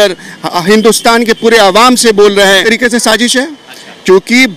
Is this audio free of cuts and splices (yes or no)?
no